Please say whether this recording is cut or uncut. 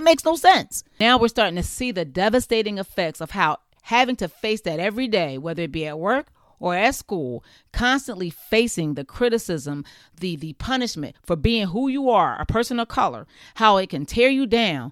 cut